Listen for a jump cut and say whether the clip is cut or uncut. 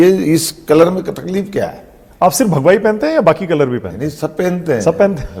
uncut